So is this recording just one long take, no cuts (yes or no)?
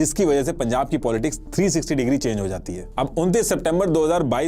no